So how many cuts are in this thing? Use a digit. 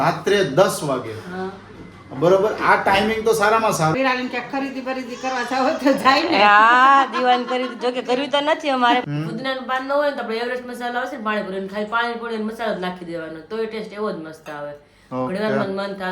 2